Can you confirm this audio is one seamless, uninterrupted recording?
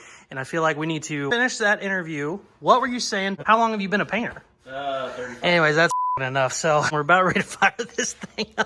no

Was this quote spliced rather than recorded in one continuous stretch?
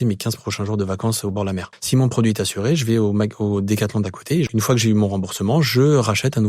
yes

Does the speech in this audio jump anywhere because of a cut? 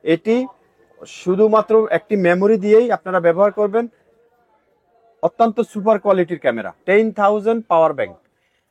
yes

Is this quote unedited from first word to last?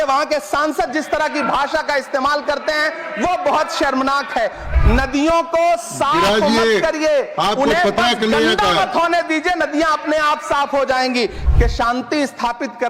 no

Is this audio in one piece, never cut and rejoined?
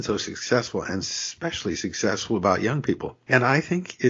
no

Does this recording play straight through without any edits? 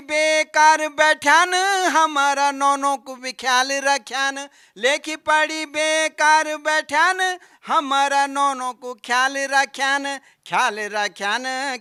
yes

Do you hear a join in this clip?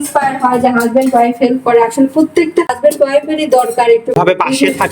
yes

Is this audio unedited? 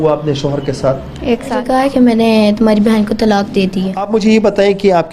no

